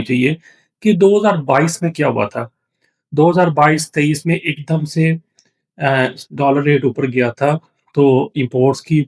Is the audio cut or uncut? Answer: uncut